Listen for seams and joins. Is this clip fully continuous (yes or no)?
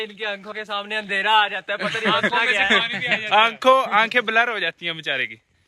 yes